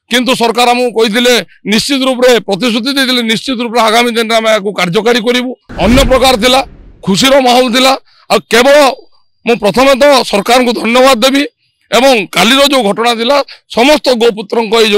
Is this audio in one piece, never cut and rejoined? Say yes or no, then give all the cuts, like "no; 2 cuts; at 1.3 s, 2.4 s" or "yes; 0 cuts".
no; 1 cut; at 5.6 s